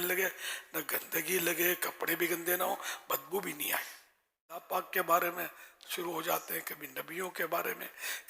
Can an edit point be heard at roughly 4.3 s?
yes; 1 cut; at 4.3 s

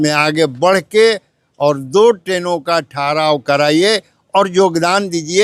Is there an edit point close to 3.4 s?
no; 0 cuts

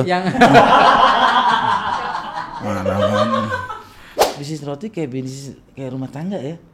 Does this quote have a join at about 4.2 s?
yes; 1 cut; at 4.2 s

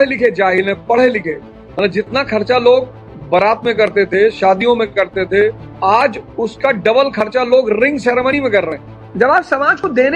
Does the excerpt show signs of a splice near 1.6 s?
yes; 2 cuts; at 1.6 s, 9.0 s

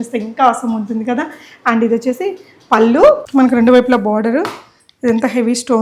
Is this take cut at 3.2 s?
yes; 1 cut; at 3.2 s

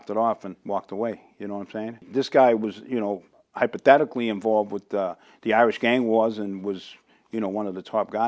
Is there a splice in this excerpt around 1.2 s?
no; 0 cuts

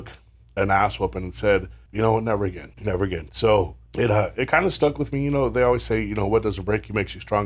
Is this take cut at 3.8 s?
yes; 3 cuts; at 1.8 s, 2.7 s, 3.8 s

